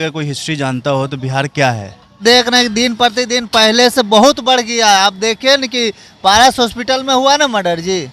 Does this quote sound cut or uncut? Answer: cut